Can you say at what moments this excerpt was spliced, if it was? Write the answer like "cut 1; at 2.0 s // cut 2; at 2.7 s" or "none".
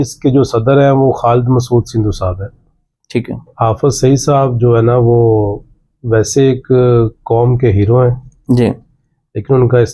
none

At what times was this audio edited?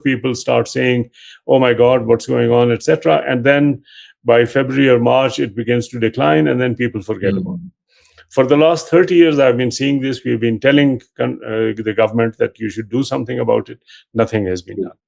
none

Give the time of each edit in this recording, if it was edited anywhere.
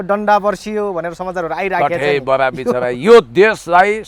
none

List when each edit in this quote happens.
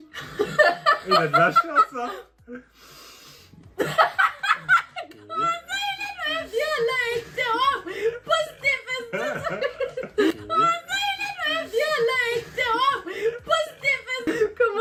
none

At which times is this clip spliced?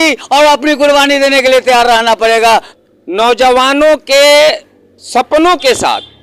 cut 1; at 2.7 s

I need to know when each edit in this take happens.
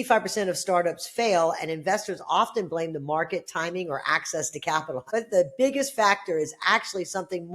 cut 1; at 5.0 s

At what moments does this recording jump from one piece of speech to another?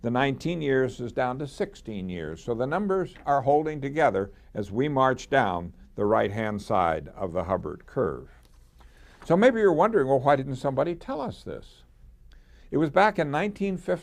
cut 1; at 2.8 s

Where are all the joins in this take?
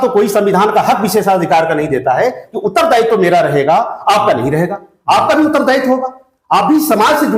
none

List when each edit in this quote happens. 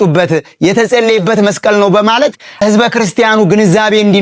cut 1; at 2.5 s

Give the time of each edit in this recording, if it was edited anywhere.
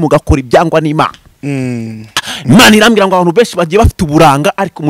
none

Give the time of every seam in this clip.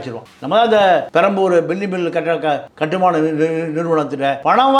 none

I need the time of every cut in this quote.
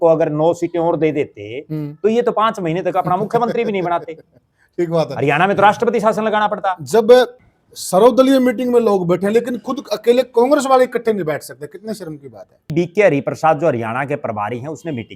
cut 1; at 7.4 s // cut 2; at 12.7 s

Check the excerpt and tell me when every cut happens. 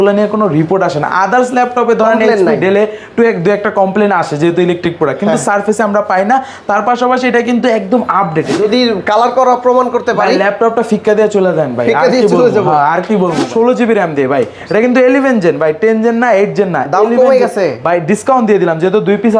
cut 1; at 8.5 s // cut 2; at 13.5 s

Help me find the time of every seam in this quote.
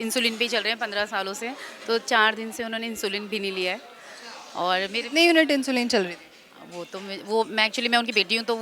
none

